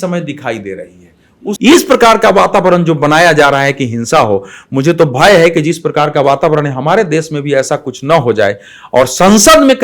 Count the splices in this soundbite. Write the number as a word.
one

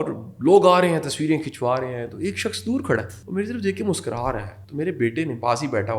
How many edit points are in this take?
two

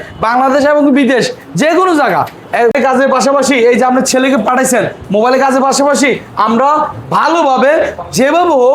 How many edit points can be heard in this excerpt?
one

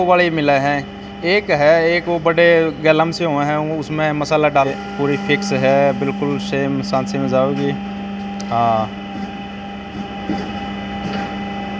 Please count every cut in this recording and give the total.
one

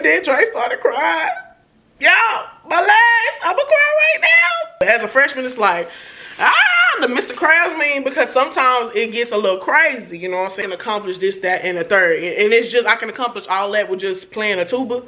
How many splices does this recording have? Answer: two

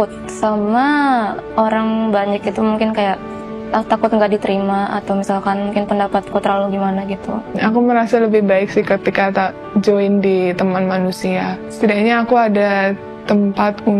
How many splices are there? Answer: one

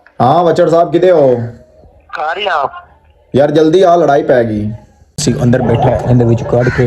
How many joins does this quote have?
one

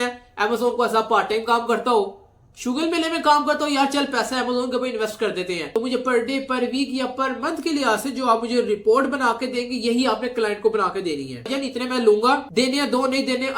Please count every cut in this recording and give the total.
two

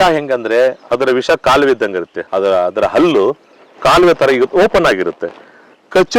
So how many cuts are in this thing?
one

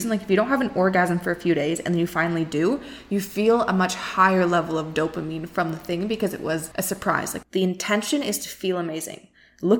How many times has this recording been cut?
one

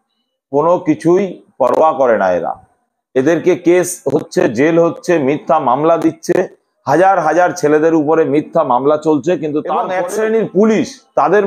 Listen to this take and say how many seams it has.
one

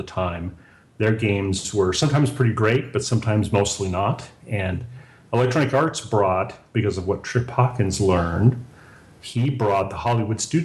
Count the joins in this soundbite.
zero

